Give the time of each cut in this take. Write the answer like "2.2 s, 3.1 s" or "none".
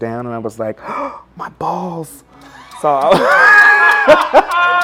none